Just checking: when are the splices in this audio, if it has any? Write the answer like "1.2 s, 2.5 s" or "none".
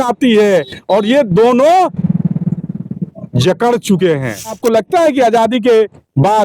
4.6 s